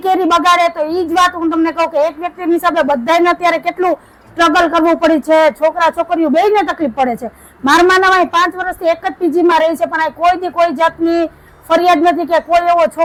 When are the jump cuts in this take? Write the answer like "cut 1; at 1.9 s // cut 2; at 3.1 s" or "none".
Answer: none